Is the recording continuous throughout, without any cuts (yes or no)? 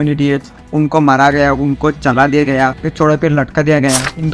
yes